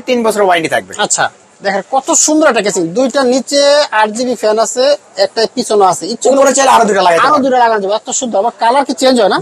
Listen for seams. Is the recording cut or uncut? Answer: cut